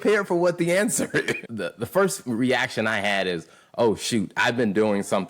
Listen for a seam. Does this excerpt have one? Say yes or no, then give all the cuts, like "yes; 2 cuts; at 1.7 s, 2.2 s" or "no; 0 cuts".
yes; 1 cut; at 1.4 s